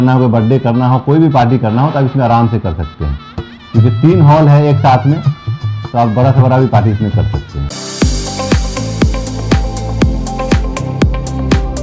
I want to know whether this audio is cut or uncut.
cut